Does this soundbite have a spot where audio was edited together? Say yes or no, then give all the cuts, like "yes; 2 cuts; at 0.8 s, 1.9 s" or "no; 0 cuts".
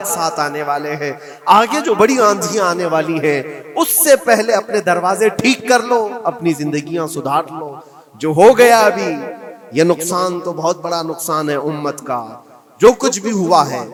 no; 0 cuts